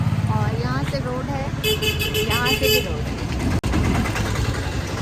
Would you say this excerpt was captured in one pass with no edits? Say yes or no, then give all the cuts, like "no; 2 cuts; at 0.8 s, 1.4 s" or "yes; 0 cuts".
yes; 0 cuts